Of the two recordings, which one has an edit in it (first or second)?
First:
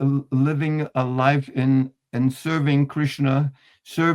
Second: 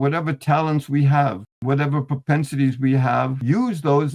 second